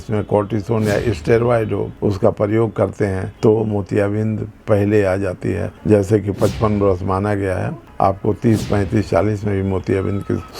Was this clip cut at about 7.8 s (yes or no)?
yes